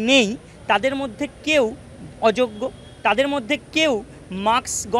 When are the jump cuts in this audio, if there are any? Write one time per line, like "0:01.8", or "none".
none